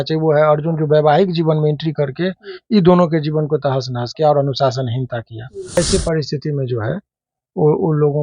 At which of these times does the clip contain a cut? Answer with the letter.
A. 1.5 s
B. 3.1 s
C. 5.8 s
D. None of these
C